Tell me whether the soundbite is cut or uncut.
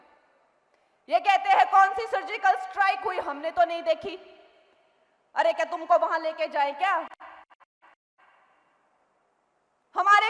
uncut